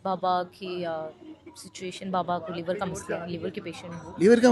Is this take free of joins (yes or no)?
yes